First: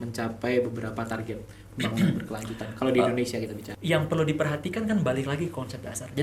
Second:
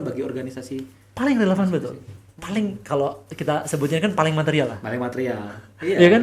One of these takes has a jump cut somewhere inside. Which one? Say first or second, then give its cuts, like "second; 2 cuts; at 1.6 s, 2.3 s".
first; 1 cut; at 3.7 s